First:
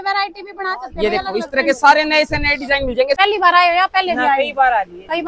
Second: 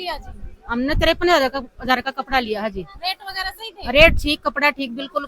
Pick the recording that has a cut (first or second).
first